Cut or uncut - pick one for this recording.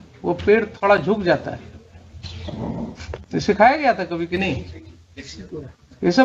cut